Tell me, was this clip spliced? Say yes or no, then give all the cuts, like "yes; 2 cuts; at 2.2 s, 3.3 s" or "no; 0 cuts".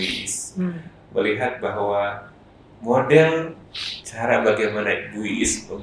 no; 0 cuts